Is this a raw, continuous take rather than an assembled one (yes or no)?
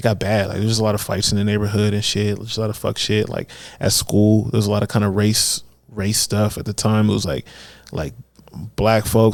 yes